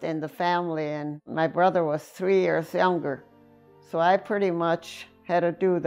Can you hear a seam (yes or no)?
no